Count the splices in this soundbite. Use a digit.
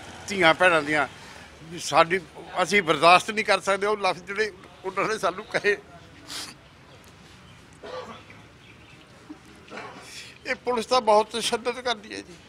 0